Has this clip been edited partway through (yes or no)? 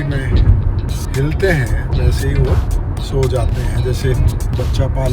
no